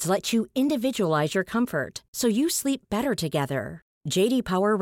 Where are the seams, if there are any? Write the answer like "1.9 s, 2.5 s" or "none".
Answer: none